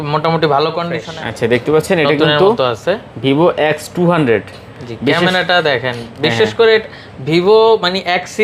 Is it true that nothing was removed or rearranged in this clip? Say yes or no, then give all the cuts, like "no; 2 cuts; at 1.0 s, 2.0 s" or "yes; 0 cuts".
no; 1 cut; at 1.0 s